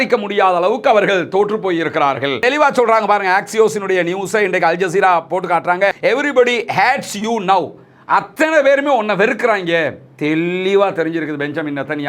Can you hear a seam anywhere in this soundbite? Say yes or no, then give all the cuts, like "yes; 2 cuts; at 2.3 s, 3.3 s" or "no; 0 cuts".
yes; 1 cut; at 2.4 s